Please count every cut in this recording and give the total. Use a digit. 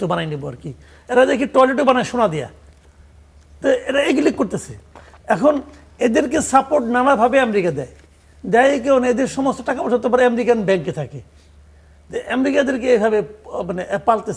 0